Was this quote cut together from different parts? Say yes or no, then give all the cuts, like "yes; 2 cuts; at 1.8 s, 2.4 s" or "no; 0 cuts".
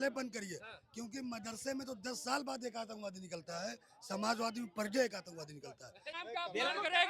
yes; 1 cut; at 6.1 s